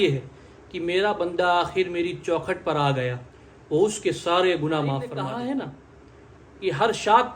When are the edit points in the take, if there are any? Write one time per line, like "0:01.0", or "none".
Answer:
0:05.1